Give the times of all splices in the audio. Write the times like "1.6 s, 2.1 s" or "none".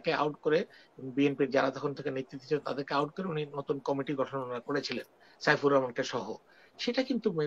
none